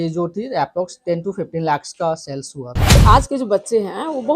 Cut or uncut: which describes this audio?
cut